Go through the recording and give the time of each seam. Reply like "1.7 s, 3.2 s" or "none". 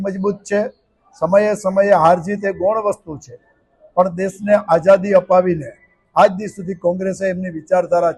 none